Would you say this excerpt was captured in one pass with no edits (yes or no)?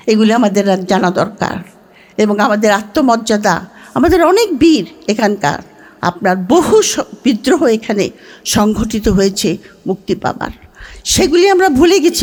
yes